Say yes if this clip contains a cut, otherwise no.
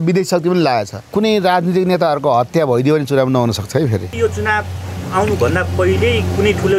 yes